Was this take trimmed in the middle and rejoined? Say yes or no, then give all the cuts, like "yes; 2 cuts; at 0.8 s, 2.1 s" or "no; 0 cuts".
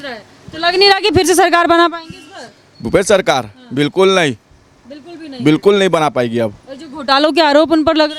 no; 0 cuts